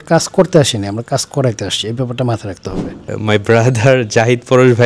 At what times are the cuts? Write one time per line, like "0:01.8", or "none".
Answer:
0:03.1